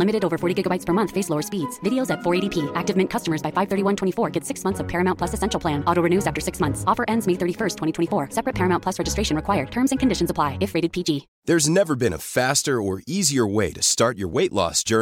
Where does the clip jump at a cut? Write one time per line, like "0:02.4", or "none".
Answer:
0:11.3

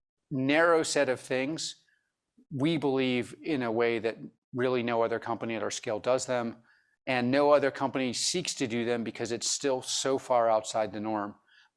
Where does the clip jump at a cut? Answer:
none

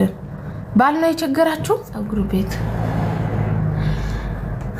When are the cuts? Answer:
0:02.0

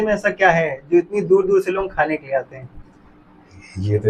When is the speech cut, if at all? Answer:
none

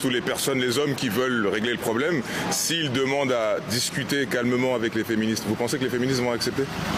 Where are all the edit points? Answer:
none

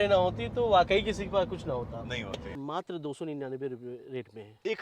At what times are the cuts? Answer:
0:02.5

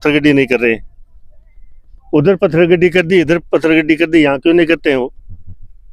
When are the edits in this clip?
none

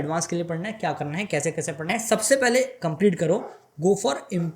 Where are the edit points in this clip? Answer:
0:01.8

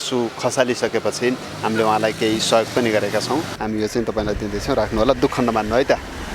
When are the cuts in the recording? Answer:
0:03.5

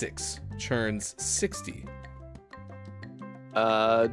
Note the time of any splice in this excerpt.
none

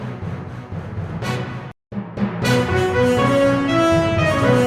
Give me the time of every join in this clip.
none

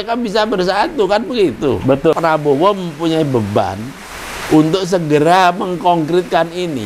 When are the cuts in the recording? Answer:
0:02.2

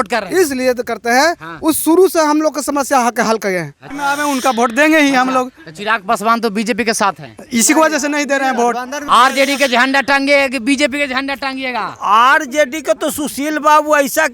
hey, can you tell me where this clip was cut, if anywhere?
0:03.8
0:09.0

